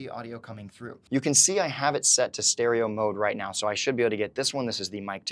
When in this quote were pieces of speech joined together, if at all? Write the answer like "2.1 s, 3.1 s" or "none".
1.0 s